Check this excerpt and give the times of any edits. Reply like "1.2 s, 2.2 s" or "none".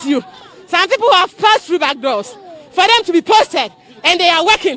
none